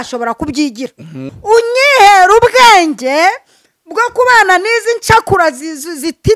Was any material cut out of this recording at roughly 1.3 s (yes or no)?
yes